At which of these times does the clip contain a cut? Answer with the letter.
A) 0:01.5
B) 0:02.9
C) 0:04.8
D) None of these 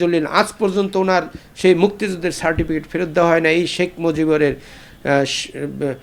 D